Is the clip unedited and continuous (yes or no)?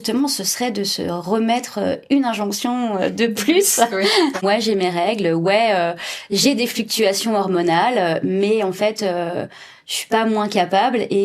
no